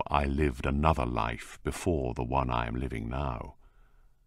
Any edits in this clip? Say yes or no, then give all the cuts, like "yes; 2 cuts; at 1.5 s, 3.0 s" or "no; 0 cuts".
no; 0 cuts